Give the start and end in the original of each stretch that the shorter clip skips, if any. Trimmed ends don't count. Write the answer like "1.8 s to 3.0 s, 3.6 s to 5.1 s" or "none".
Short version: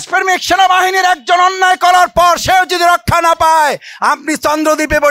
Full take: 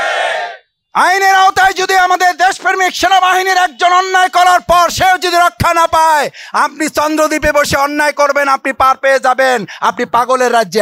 none